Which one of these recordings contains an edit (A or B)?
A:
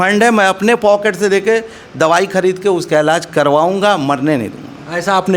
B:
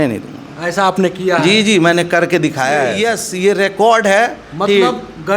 B